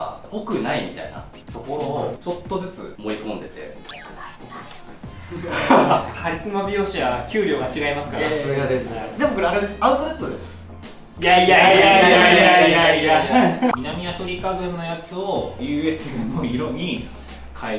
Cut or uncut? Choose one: cut